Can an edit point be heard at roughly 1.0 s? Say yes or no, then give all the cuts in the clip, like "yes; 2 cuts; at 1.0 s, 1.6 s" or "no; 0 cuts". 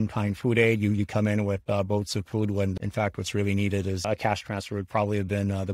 no; 2 cuts; at 2.7 s, 4.0 s